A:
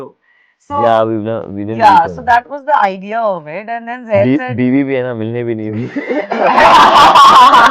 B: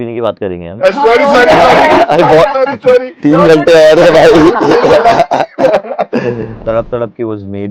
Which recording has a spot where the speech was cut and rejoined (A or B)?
B